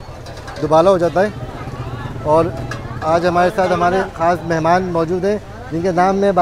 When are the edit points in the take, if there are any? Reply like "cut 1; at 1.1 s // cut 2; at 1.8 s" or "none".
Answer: none